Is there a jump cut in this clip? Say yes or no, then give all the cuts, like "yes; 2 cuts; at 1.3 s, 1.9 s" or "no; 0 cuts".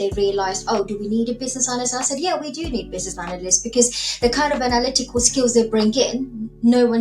no; 0 cuts